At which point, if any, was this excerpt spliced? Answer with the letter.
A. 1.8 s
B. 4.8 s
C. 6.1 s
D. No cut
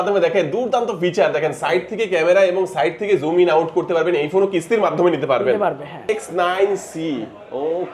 C